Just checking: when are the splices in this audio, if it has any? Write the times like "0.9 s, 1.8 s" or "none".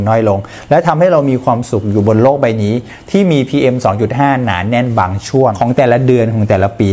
5.5 s

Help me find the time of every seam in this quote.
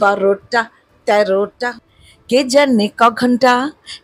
1.8 s

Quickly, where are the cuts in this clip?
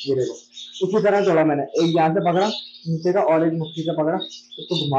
none

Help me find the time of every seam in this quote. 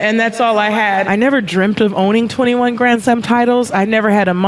1.1 s

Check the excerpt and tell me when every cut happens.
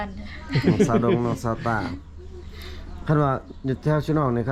none

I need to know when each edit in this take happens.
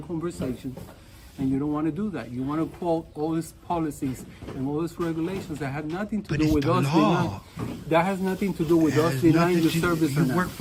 none

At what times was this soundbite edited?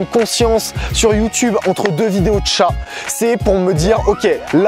none

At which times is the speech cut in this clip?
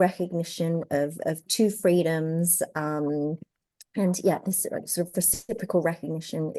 none

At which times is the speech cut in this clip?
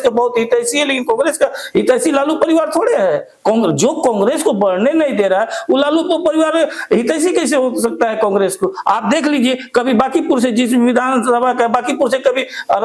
none

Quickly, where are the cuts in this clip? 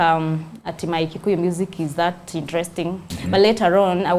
3.1 s

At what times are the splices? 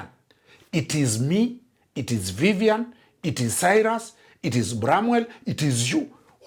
none

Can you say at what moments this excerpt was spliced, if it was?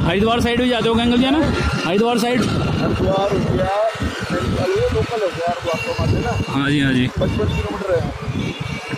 none

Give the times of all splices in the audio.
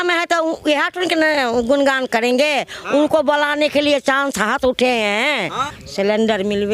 5.5 s

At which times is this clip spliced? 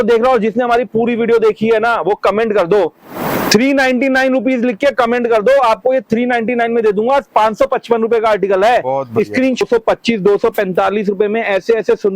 9.6 s

